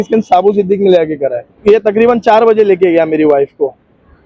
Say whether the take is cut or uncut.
cut